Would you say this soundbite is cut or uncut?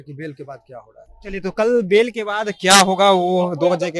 uncut